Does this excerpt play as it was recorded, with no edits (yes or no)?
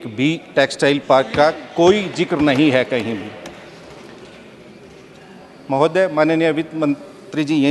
yes